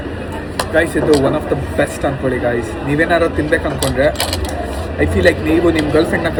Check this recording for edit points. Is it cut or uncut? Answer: uncut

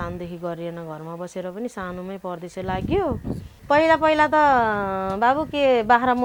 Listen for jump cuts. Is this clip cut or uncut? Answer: cut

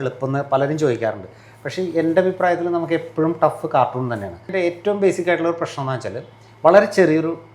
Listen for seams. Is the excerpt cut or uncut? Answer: cut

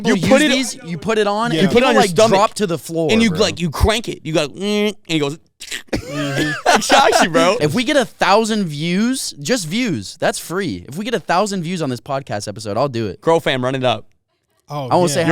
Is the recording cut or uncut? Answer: cut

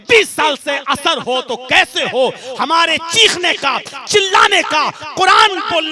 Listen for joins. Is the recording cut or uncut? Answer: uncut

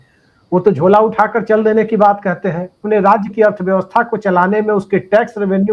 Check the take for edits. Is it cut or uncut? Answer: cut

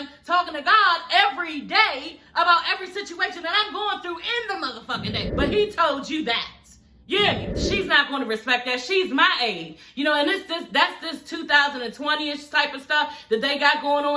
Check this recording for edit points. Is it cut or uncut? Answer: cut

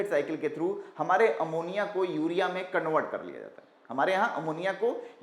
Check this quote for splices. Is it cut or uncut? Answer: uncut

